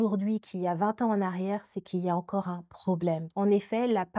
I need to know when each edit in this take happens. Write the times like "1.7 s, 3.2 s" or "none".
3.3 s